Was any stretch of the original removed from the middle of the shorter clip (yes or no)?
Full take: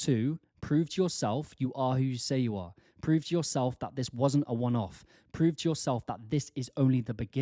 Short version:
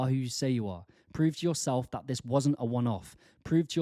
no